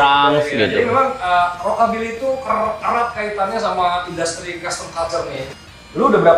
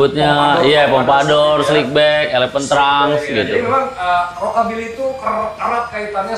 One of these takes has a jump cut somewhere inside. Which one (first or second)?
first